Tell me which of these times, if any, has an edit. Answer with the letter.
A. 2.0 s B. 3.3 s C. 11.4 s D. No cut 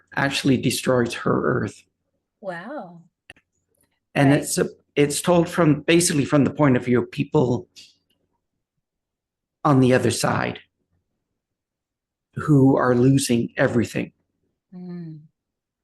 B